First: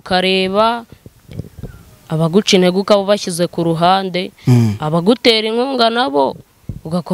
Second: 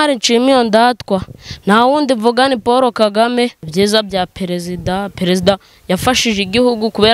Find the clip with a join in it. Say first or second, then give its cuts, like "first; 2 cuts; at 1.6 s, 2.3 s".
second; 1 cut; at 3.6 s